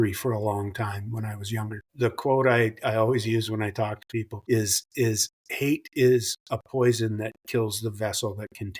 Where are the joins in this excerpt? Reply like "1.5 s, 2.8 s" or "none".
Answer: 1.9 s, 4.3 s